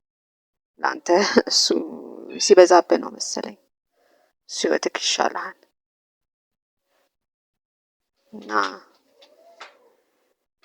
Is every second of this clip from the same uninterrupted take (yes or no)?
yes